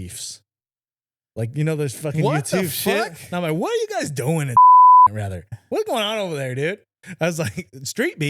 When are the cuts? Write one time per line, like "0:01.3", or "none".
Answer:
0:04.5